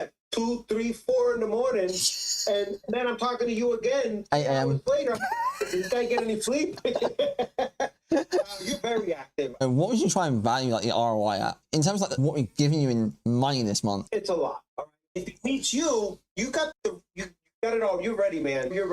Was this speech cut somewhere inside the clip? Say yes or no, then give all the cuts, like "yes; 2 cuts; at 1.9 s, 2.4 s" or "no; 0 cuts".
yes; 3 cuts; at 9.5 s, 14.0 s, 15.2 s